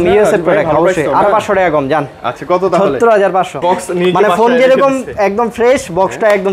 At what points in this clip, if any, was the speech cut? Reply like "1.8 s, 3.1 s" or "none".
3.6 s